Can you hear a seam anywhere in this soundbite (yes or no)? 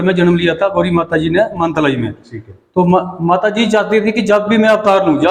no